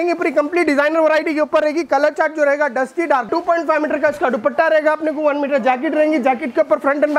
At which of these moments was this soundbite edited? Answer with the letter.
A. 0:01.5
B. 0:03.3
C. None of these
B